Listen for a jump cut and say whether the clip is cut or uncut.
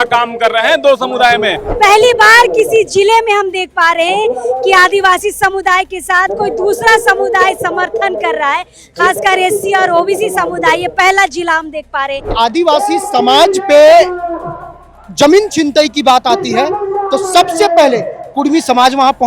cut